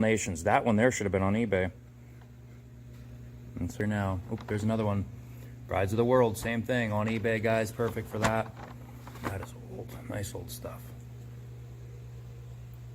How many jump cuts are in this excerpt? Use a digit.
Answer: 1